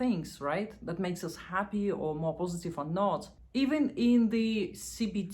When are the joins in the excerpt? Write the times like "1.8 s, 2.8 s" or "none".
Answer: 3.4 s